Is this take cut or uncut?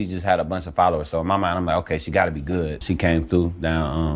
cut